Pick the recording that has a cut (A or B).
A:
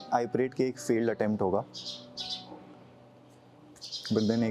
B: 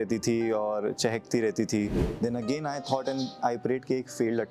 B